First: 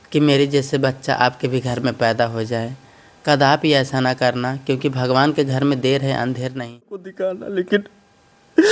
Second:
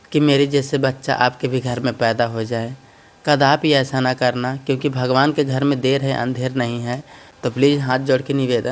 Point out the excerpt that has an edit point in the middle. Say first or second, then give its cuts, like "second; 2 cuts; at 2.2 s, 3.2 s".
first; 1 cut; at 7.0 s